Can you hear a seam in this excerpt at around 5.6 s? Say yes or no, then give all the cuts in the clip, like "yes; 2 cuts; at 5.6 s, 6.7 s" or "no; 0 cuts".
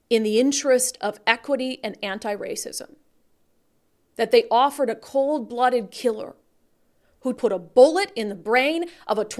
no; 1 cut; at 7.4 s